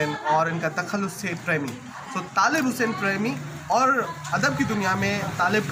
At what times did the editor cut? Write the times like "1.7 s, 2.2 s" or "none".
none